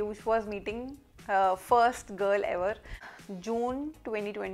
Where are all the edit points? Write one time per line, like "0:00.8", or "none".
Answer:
0:03.1